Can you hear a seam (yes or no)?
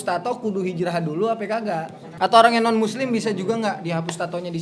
yes